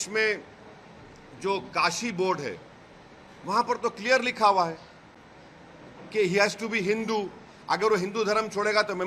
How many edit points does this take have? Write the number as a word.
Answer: zero